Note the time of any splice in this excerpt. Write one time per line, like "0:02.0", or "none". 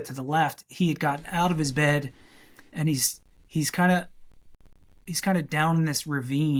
none